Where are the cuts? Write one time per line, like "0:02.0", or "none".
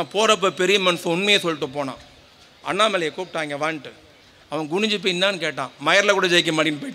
none